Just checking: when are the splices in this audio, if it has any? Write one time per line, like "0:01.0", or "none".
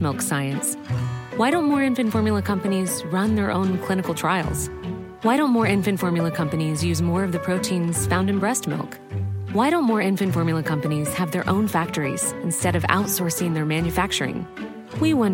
none